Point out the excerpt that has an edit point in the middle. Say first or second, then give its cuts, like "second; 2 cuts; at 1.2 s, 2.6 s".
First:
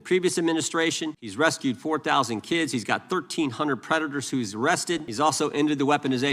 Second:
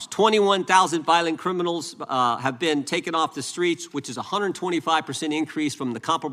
first; 2 cuts; at 1.2 s, 5.1 s